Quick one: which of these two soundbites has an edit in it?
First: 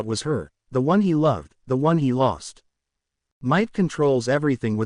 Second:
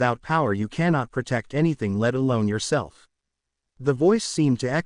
first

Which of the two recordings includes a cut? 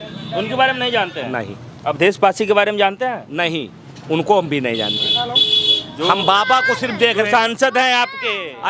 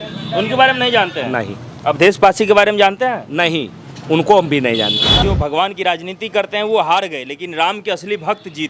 second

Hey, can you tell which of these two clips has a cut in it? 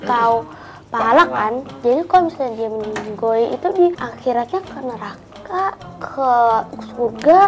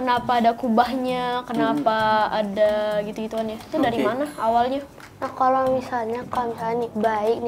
second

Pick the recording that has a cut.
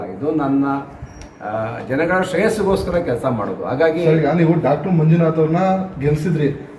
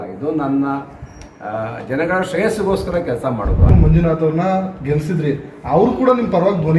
second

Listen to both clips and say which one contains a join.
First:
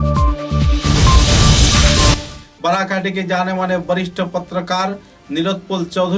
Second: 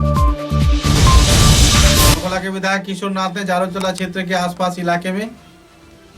second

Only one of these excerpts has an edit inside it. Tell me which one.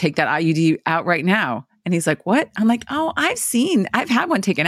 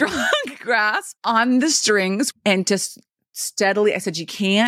second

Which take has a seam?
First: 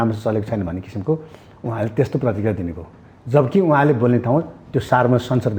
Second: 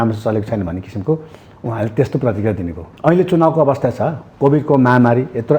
second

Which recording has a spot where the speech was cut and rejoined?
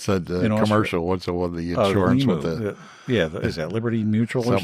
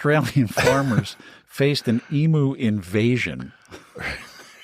first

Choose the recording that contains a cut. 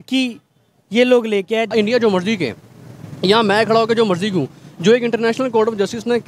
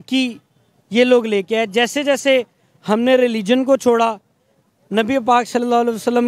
first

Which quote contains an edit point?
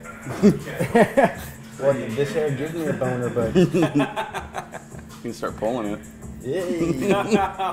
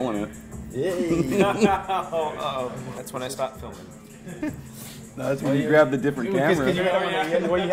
second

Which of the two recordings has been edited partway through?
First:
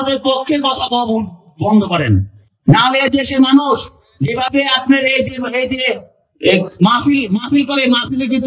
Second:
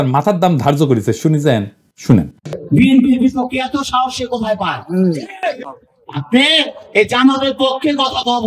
second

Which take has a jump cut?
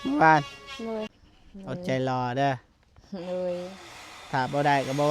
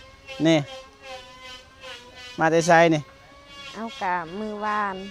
first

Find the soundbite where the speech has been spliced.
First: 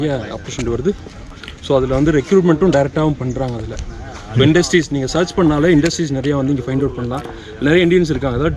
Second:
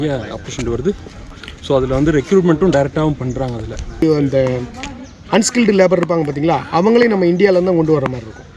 second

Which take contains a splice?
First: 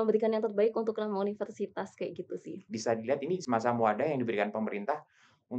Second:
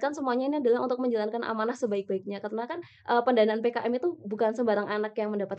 first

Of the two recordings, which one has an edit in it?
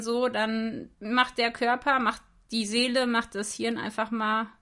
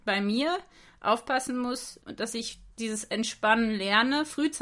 second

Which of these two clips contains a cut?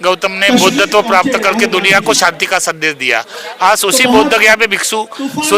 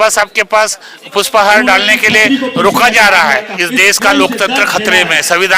second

